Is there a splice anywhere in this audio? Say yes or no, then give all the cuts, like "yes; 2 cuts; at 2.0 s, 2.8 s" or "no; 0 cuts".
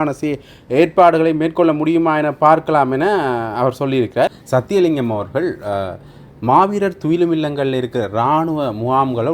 yes; 1 cut; at 4.4 s